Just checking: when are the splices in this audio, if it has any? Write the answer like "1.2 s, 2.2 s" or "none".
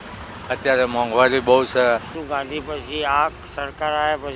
2.2 s